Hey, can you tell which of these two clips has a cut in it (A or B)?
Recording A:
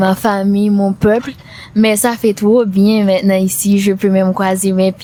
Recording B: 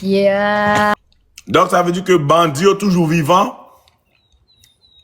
B